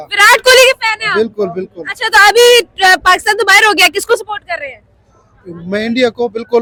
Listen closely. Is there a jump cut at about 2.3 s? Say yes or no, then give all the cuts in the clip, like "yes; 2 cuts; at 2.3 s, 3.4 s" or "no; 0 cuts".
no; 0 cuts